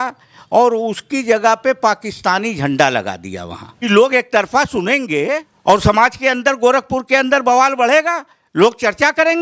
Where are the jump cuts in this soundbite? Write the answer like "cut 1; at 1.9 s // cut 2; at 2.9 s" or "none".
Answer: cut 1; at 3.9 s // cut 2; at 5.5 s